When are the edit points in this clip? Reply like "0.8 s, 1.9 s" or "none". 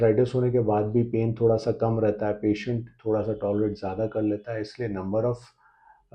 none